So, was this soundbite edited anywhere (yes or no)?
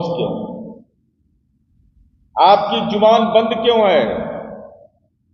no